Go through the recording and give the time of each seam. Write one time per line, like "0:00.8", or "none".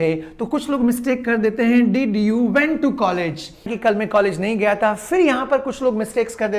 0:03.7